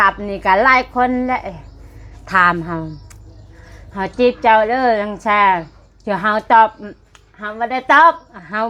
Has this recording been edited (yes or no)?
no